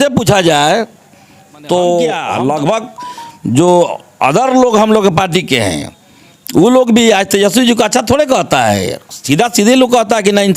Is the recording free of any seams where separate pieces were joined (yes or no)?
no